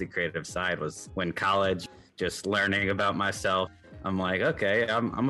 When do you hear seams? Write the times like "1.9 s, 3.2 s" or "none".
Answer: 1.0 s, 1.8 s, 3.7 s